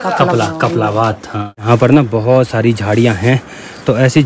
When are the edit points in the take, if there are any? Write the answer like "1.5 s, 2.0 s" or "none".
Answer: 1.6 s